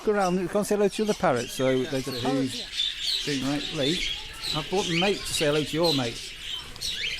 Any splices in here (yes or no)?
yes